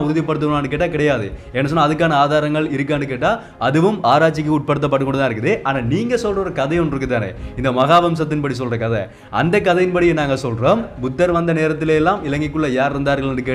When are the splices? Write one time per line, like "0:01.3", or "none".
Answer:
0:11.0